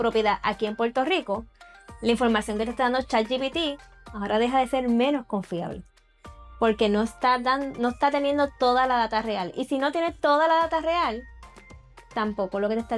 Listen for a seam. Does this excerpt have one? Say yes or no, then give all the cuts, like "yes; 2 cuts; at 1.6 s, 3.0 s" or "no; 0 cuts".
no; 0 cuts